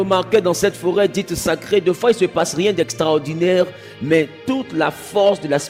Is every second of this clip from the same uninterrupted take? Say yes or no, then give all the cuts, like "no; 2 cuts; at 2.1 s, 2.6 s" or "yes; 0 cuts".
yes; 0 cuts